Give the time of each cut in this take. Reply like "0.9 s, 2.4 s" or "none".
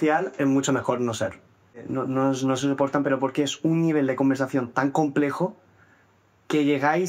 1.7 s